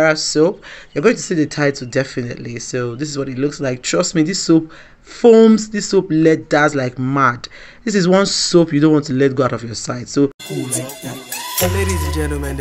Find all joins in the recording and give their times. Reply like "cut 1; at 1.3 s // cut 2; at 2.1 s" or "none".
cut 1; at 10.4 s